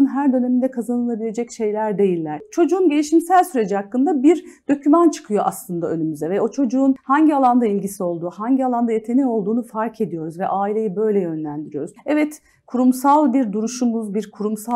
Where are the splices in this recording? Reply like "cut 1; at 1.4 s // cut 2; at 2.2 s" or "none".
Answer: cut 1; at 2.5 s // cut 2; at 7.0 s // cut 3; at 11.8 s